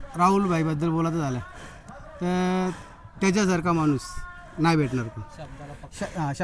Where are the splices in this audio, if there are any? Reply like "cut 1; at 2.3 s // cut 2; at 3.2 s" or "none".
none